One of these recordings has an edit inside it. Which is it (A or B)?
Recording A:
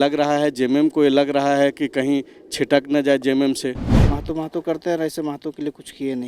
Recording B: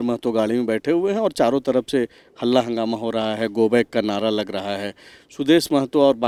A